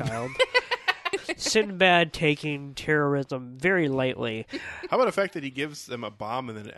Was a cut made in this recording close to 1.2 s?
yes; 1 cut; at 1.2 s

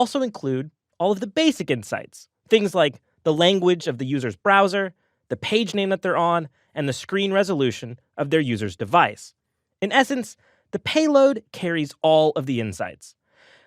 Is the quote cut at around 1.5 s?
yes; 1 cut; at 1.5 s

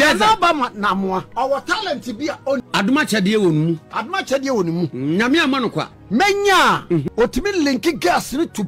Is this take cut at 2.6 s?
yes; 4 cuts; at 1.3 s, 2.6 s, 5.9 s, 7.0 s

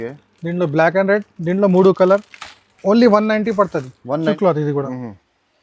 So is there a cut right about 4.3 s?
yes; 1 cut; at 4.3 s

